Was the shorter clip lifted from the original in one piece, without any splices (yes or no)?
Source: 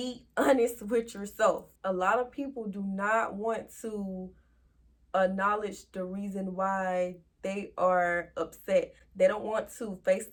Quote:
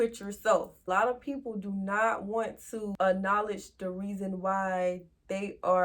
no